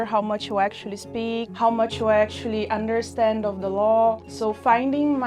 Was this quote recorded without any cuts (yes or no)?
no